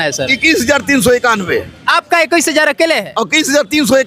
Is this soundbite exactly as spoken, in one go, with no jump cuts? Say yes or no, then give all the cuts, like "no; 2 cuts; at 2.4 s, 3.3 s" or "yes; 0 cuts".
yes; 0 cuts